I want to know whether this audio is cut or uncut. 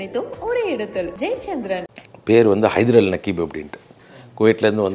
cut